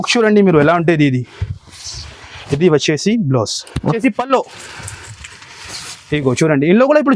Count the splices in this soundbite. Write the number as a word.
one